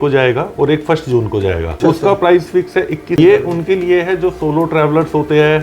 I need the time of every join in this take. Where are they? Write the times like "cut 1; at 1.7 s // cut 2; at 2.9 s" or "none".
cut 1; at 1.8 s // cut 2; at 3.2 s